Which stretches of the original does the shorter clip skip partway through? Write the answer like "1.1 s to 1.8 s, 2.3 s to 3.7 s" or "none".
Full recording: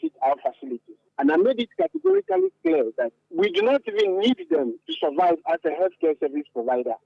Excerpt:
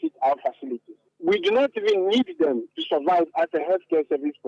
1.1 s to 3.2 s

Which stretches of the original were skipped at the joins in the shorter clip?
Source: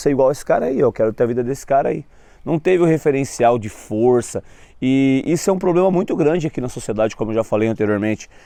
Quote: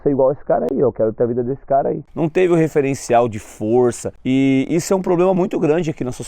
2.0 s to 2.3 s, 4.4 s to 4.7 s

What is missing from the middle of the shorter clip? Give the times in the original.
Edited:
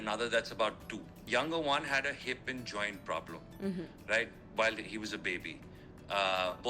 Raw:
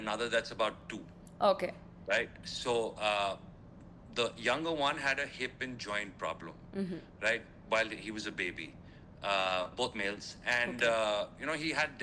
1.2 s to 4.4 s

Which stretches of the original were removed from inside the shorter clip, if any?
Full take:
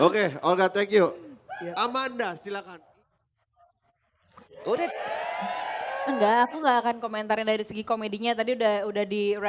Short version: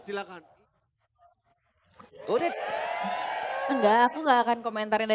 none

